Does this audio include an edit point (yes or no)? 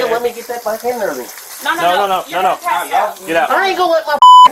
no